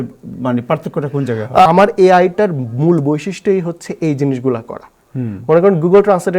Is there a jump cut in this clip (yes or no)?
yes